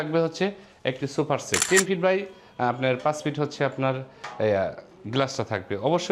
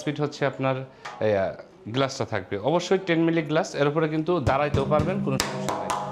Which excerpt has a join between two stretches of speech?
first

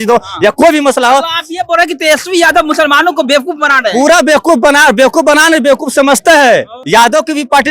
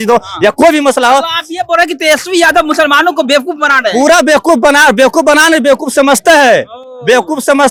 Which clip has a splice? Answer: first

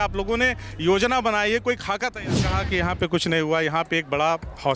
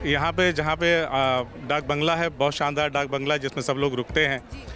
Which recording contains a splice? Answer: first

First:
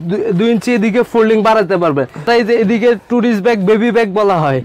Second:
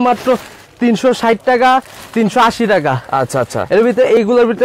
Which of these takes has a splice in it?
first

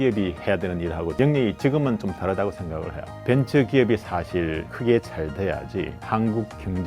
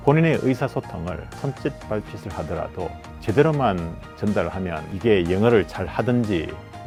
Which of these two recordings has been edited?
first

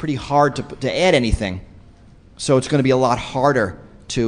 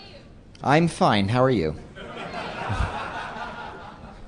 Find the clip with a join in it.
first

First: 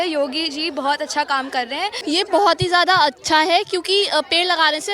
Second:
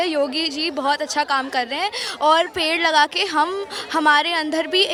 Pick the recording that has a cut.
first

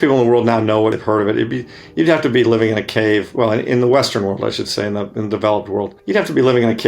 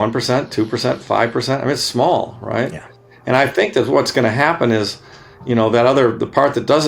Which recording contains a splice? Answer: first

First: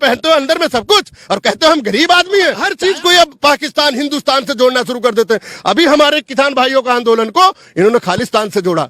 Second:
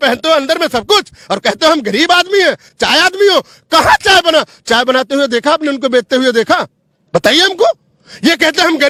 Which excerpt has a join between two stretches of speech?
first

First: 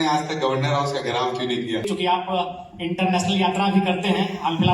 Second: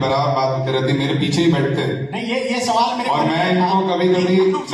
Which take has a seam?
first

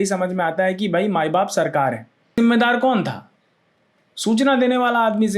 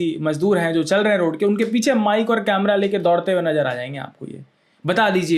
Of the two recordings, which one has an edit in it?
first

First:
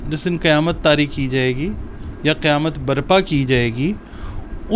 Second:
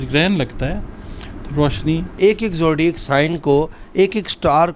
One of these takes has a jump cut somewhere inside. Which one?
second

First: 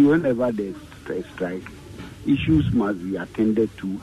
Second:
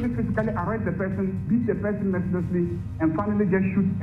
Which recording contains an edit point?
second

